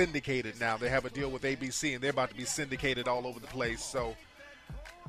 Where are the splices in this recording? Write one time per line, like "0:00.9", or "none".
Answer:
0:03.2